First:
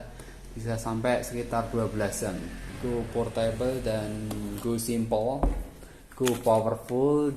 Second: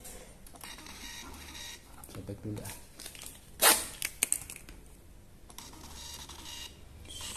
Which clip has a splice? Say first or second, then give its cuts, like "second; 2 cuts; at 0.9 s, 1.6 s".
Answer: first; 1 cut; at 2.7 s